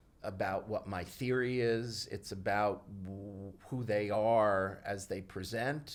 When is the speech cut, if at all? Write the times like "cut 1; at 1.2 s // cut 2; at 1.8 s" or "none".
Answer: none